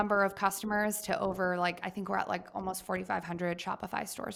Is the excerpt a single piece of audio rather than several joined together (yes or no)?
yes